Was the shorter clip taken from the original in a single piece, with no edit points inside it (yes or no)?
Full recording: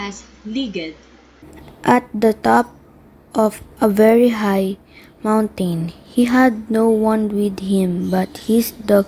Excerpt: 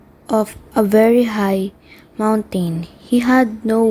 yes